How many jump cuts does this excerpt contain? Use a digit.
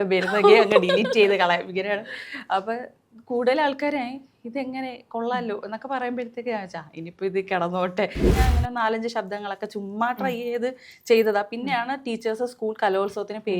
1